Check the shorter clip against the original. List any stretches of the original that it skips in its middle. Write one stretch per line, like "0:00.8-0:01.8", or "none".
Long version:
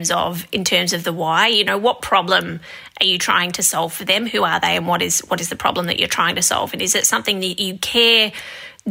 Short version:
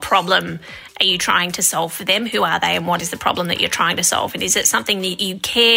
0:05.0-0:05.4